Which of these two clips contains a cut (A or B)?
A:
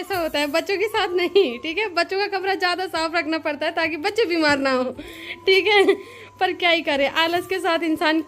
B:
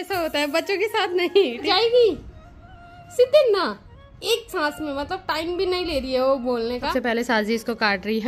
B